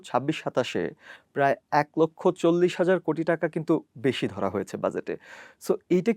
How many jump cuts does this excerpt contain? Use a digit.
0